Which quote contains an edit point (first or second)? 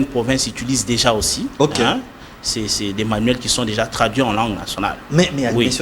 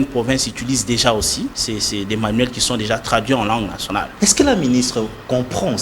second